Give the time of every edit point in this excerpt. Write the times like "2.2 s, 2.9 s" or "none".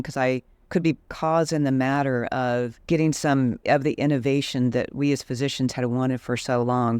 1.1 s